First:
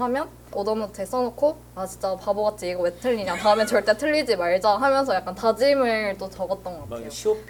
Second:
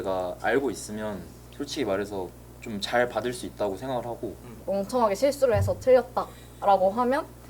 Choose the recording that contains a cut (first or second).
second